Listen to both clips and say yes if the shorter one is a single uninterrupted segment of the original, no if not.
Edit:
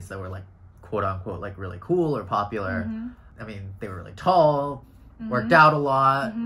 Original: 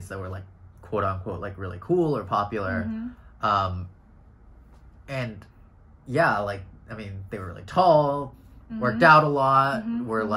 no